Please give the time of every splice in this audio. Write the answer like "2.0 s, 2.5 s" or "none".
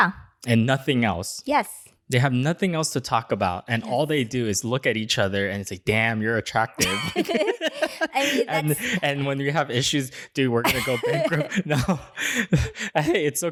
none